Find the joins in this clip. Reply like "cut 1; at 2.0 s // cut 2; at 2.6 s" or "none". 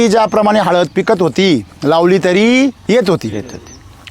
cut 1; at 2.8 s